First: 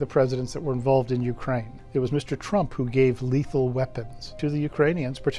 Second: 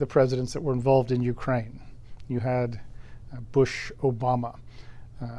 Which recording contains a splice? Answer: first; 2 cuts; at 1.8 s, 4.4 s

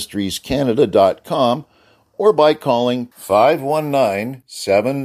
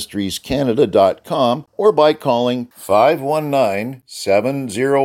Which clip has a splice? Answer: second; 1 cut; at 1.7 s

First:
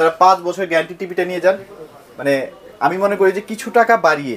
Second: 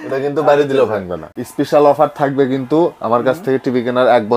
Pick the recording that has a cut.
second; 1 cut; at 1.3 s

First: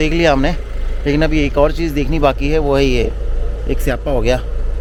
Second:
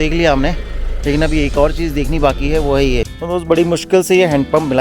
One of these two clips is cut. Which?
second; 1 cut; at 3.1 s

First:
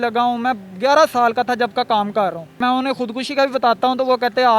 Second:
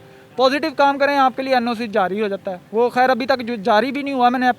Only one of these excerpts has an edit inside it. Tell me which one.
first; 1 cut; at 2.6 s

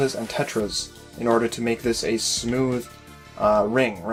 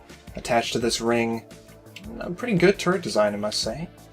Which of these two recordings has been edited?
second; 1 cut; at 1.3 s

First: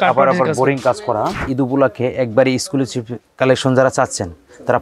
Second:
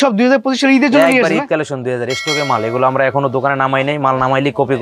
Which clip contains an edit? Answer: first; 1 cut; at 1.4 s

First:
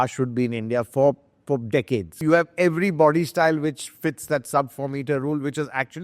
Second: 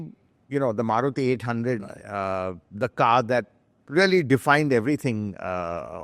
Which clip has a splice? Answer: first; 1 cut; at 2.1 s

